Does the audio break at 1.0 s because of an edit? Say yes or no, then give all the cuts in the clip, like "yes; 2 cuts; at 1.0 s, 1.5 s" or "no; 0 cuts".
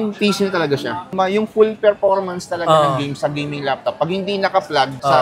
yes; 1 cut; at 1.0 s